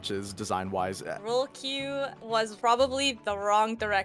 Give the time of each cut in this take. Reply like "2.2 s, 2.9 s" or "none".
1.2 s, 2.3 s